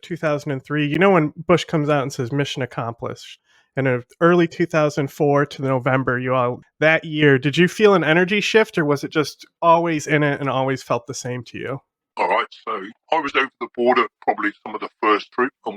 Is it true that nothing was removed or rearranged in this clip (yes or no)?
no